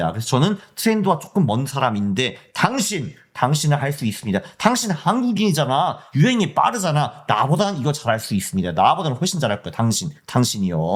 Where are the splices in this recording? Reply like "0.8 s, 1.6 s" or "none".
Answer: none